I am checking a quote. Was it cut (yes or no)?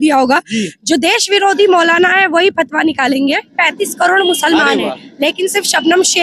yes